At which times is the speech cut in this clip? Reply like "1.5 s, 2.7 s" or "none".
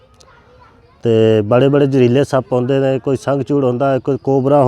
none